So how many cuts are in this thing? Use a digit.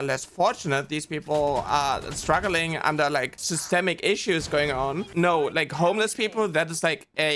2